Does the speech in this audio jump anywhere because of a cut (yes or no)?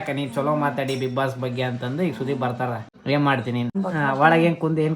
yes